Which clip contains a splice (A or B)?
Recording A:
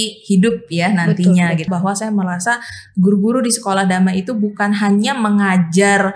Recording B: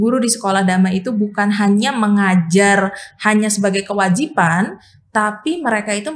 A